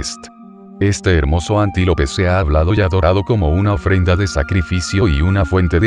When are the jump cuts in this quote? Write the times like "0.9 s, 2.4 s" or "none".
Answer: 4.3 s